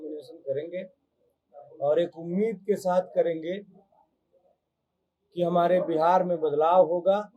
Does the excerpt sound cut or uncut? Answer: uncut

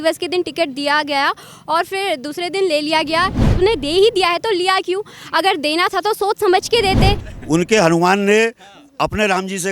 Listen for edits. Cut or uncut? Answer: cut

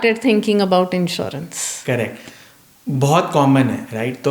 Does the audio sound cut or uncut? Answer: uncut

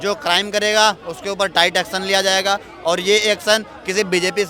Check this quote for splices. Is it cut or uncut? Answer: uncut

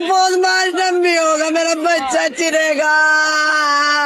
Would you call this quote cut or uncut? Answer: uncut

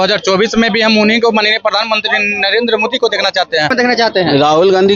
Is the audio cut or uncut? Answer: cut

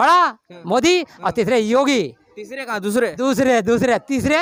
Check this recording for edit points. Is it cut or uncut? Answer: uncut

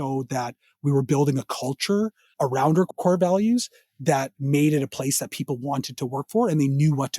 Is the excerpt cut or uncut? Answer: uncut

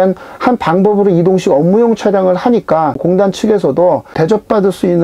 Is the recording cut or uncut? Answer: cut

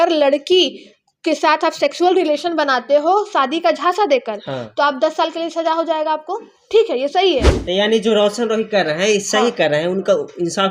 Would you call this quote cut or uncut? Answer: cut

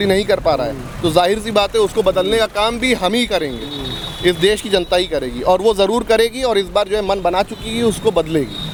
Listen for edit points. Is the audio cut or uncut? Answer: uncut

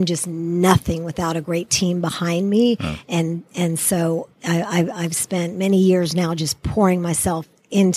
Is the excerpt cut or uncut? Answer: uncut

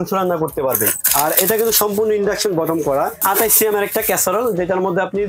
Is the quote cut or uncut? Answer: cut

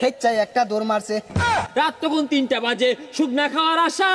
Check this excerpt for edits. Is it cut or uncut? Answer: cut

